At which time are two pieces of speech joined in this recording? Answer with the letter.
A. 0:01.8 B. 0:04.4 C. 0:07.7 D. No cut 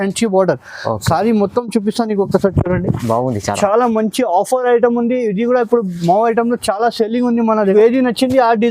C